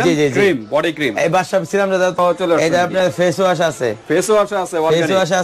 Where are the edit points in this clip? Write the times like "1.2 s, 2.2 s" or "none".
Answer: 2.2 s

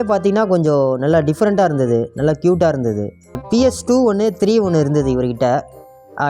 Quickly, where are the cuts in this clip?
3.4 s

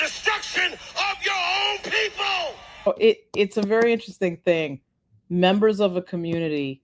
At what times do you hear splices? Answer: 2.9 s

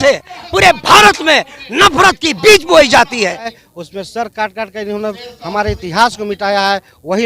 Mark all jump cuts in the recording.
3.5 s

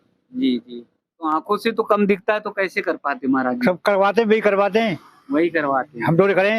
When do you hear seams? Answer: 0.9 s

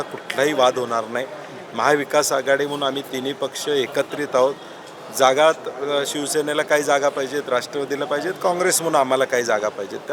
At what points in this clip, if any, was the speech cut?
none

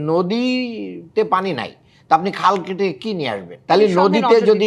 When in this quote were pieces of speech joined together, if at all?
3.5 s

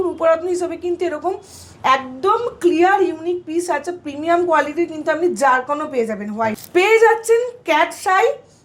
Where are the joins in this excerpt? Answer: 6.6 s

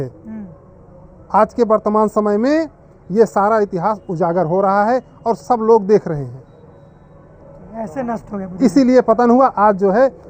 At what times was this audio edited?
none

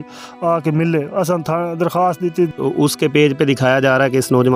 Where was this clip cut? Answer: 2.5 s

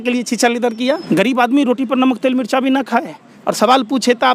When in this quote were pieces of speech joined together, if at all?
1.0 s

